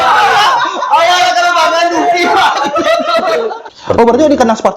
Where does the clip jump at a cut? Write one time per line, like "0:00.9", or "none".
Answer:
0:03.6